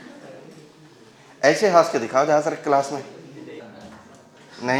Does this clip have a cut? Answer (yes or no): yes